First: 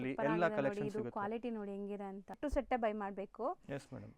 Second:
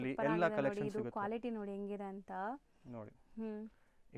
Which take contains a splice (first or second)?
first